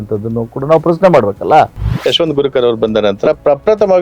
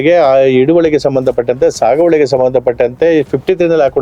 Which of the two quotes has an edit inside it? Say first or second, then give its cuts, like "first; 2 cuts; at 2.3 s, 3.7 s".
first; 1 cut; at 1.9 s